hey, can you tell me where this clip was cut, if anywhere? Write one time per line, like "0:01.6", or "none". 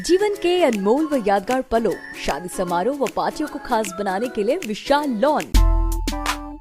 0:05.6